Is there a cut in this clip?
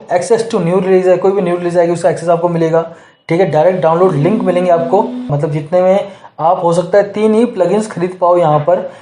yes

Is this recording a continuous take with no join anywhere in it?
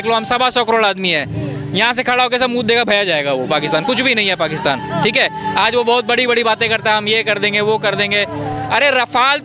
yes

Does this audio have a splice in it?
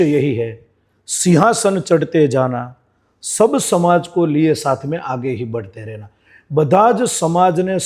no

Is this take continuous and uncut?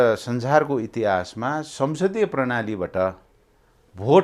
yes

